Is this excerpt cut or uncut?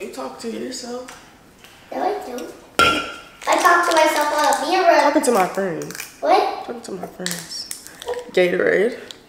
uncut